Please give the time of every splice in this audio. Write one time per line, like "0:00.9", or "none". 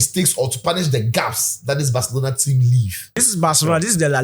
0:03.3